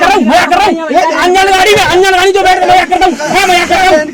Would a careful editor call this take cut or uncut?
uncut